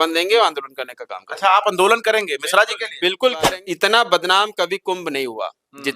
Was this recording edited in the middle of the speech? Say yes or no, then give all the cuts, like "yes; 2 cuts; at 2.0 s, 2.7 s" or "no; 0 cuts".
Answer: yes; 1 cut; at 3.5 s